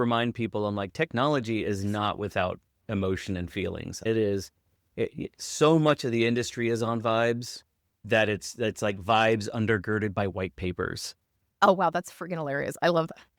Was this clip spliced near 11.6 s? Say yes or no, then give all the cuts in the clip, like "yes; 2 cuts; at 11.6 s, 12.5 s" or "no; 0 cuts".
yes; 1 cut; at 11.6 s